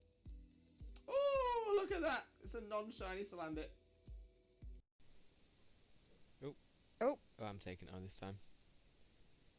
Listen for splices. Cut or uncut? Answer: cut